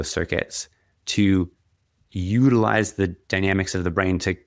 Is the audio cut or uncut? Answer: uncut